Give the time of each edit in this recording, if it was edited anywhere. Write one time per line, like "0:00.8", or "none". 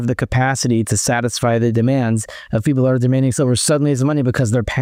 none